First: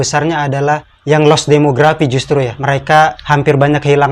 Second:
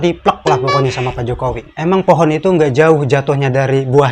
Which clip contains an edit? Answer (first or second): first